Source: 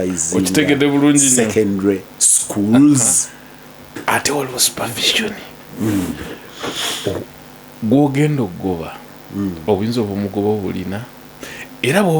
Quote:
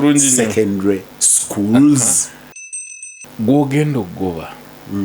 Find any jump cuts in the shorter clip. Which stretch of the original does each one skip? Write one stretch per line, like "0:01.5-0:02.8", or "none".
0:03.9-0:07.3